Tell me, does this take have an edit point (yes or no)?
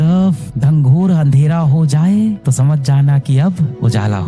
no